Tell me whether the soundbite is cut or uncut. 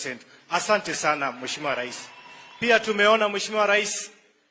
cut